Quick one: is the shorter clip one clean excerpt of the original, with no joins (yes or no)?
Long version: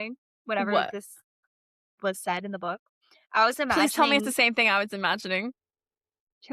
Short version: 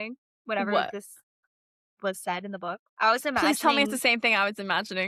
no